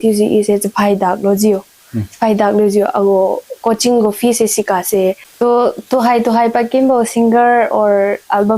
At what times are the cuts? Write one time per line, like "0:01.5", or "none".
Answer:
0:05.3